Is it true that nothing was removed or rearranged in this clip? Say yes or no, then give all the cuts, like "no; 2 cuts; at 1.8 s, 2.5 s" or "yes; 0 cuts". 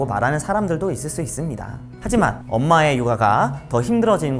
no; 1 cut; at 2.4 s